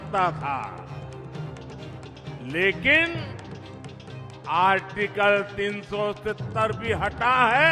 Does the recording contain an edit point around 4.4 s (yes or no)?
no